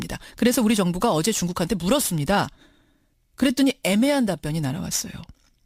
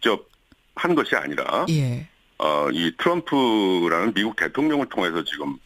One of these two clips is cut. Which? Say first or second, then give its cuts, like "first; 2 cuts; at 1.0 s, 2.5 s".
second; 1 cut; at 2.8 s